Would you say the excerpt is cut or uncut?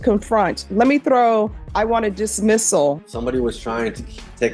cut